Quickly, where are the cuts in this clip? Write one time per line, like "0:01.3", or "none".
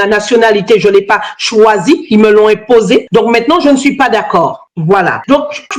0:03.1